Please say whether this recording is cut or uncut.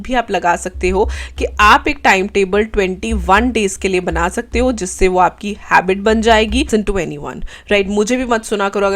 cut